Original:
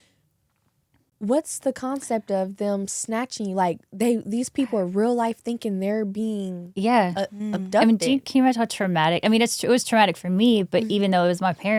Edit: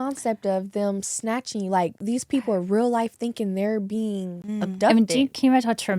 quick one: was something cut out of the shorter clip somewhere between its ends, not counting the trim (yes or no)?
yes